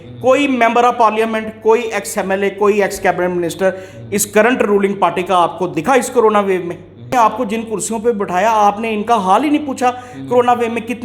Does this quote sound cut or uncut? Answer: cut